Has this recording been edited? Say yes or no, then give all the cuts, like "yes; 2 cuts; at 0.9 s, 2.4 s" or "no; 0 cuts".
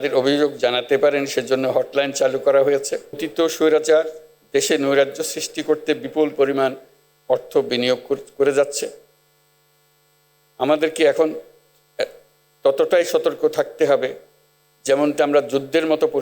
yes; 1 cut; at 3.2 s